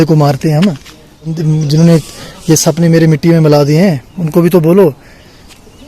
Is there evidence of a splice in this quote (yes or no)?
yes